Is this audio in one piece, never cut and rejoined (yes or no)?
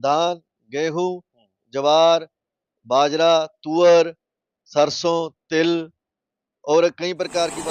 yes